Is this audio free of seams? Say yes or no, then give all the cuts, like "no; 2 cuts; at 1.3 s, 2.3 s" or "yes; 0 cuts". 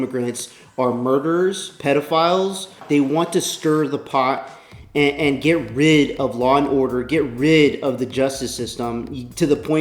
no; 1 cut; at 2.8 s